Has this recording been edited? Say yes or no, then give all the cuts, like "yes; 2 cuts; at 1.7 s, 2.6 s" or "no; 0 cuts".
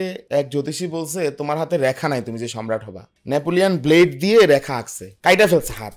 no; 0 cuts